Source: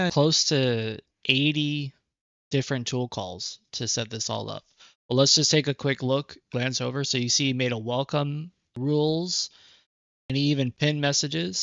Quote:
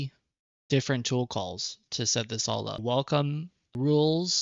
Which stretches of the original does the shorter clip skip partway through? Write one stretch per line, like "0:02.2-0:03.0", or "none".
0:04.6-0:07.8